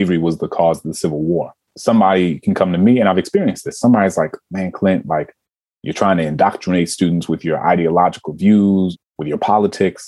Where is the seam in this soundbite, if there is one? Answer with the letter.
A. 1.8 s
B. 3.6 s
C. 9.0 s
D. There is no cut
C